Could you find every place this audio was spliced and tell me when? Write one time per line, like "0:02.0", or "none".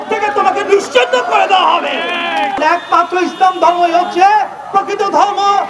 0:02.6

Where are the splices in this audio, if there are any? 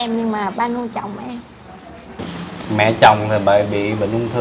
0:02.2

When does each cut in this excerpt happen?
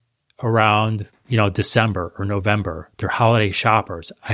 none

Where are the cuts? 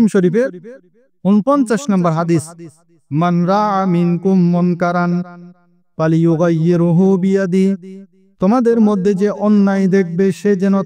none

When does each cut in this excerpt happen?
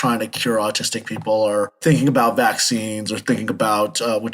0:01.7

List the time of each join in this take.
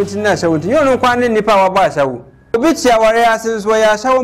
0:02.5

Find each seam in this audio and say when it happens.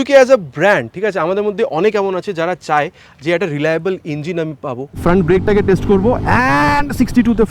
0:05.0

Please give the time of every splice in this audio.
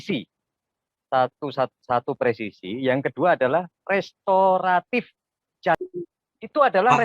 0:05.9

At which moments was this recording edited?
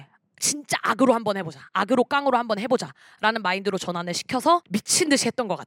0:04.7

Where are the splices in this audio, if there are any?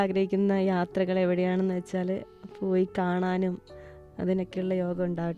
none

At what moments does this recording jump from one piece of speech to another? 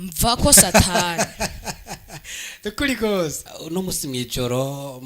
0:03.5

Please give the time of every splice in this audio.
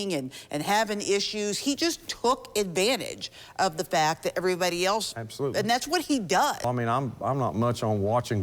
0:06.6

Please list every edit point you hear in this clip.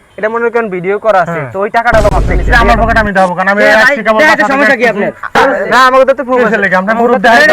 0:02.3
0:05.3

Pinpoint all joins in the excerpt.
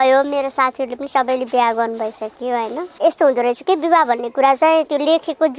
0:02.8

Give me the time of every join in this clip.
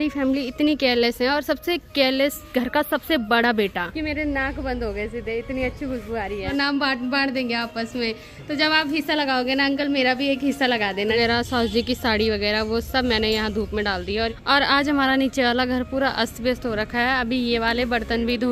0:04.2
0:06.3
0:11.1
0:14.3

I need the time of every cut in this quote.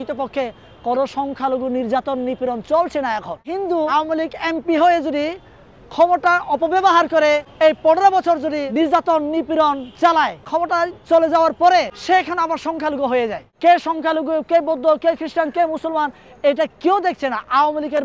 0:03.9
0:07.5
0:08.7
0:10.5
0:11.9
0:13.4

